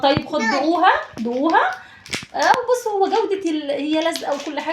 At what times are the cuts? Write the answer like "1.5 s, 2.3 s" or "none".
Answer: none

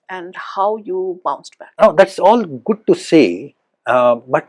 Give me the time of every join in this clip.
1.6 s

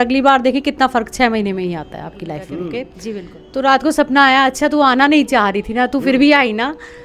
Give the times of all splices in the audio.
3.4 s

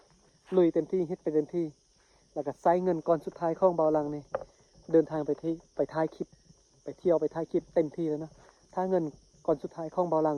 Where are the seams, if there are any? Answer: none

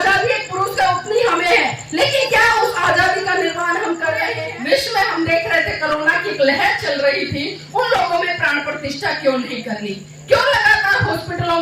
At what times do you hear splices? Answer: 4.3 s

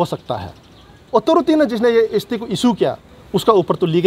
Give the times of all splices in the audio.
1.0 s, 3.1 s

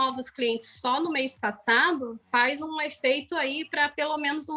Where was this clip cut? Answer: none

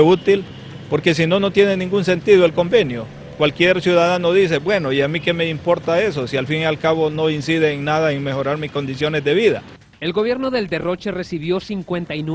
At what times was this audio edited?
8.6 s

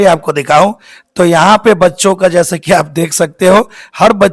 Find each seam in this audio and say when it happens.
none

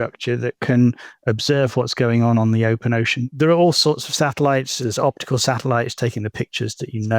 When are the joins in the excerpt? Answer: 3.2 s, 4.8 s

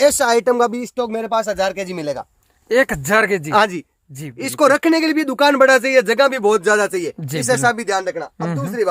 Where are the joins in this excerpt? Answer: none

